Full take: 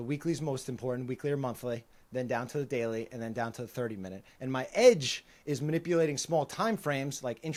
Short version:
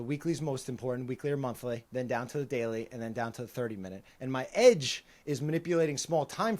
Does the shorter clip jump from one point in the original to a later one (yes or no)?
yes